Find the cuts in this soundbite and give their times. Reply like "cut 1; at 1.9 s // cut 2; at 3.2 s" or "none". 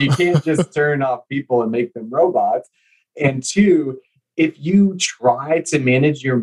none